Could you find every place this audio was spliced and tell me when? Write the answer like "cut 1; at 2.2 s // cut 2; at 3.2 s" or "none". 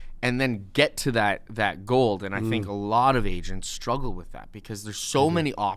none